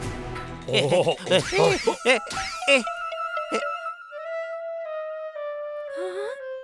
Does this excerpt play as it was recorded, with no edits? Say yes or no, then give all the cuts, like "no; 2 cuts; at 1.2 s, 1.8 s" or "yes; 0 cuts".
yes; 0 cuts